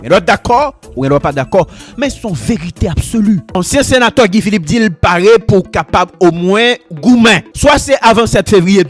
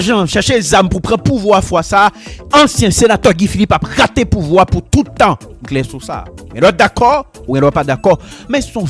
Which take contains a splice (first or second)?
first